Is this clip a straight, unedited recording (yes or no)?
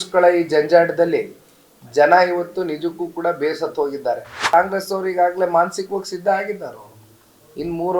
no